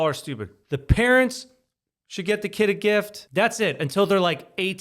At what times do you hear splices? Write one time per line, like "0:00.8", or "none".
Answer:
0:03.2